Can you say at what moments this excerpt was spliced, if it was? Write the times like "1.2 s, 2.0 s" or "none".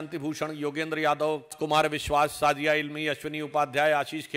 1.5 s